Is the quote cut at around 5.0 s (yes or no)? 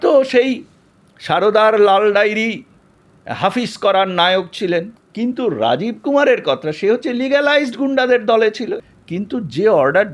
yes